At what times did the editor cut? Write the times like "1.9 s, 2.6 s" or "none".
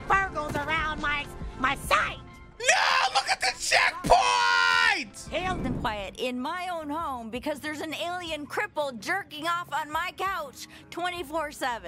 5.6 s